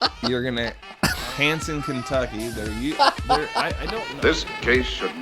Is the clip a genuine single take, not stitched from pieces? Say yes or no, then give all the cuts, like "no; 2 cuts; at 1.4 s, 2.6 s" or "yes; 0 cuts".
no; 1 cut; at 4.0 s